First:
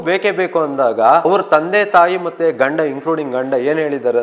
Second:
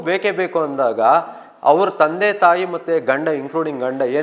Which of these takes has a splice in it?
first; 1 cut; at 1.3 s

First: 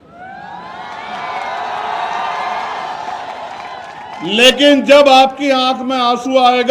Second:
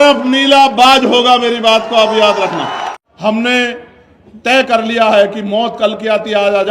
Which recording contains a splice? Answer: second; 1 cut; at 2.9 s

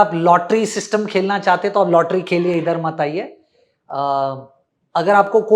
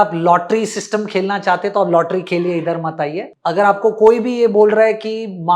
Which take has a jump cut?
second; 1 cut; at 3.3 s

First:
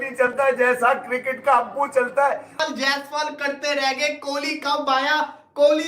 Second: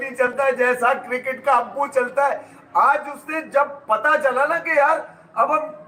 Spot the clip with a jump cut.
first; 1 cut; at 2.5 s

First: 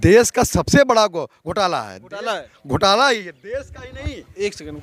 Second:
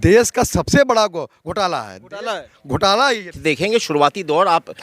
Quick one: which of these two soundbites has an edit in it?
second; 1 cut; at 3.4 s

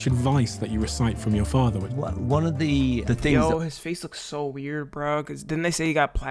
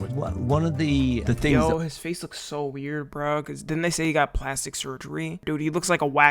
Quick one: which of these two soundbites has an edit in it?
second; 1 cut; at 5.4 s

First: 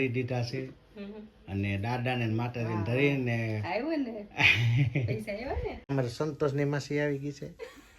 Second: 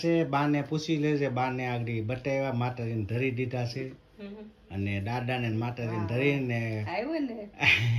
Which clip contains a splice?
first; 1 cut; at 5.9 s

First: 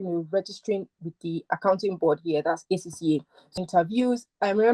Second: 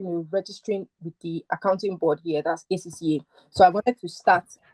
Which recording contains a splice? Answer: first; 1 cut; at 3.5 s

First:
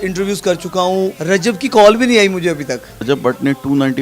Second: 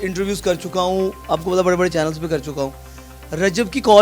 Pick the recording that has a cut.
first; 2 cuts; at 1.2 s, 3.0 s

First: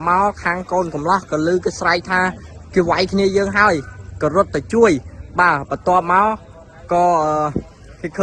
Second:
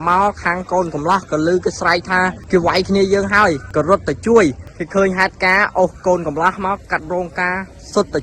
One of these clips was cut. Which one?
second; 3 cuts; at 2.4 s, 3.6 s, 4.7 s

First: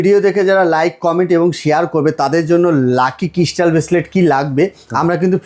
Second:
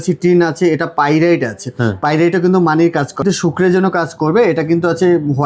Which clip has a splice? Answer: second; 1 cut; at 3.2 s

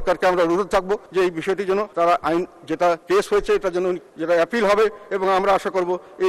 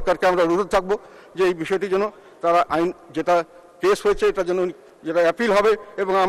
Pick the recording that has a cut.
first; 4 cuts; at 1.1 s, 1.9 s, 3.0 s, 4.1 s

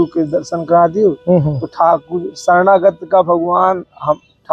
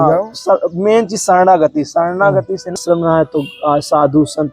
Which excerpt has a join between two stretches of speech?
second; 1 cut; at 2.8 s

